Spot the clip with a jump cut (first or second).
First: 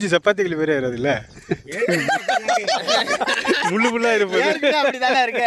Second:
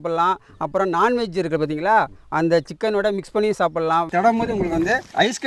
second